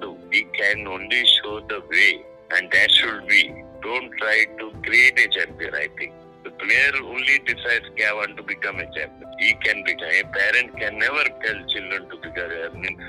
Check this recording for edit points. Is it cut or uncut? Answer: cut